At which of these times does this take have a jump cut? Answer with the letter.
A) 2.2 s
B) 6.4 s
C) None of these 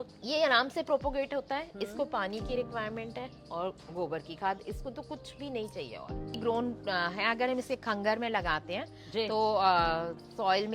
B